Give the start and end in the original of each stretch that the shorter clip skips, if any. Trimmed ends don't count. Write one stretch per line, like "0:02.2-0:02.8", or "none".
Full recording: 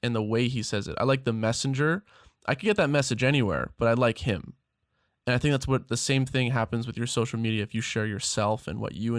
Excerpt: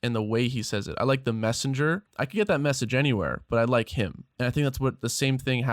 0:02.1-0:02.4
0:04.5-0:05.1